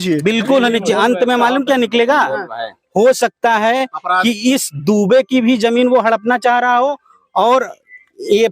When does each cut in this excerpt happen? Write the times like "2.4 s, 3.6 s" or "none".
none